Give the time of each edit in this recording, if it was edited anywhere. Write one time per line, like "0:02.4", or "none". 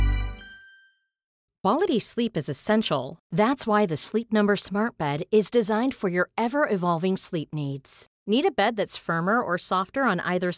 0:01.4